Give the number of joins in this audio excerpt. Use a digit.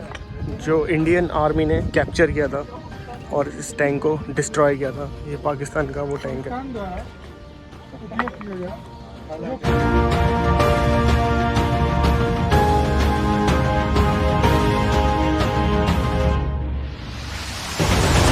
0